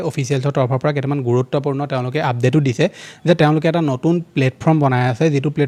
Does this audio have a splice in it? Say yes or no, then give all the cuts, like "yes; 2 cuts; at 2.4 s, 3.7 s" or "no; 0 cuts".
no; 0 cuts